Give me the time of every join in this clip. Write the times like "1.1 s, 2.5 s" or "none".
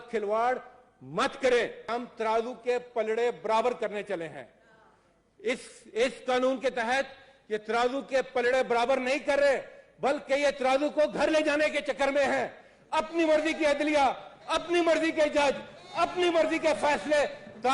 1.9 s